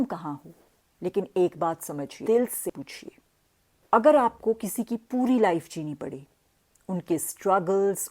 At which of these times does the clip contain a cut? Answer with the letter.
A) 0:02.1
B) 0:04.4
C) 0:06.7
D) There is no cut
A